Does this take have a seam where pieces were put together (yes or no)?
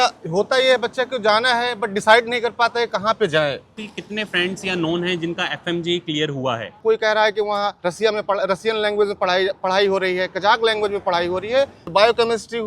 yes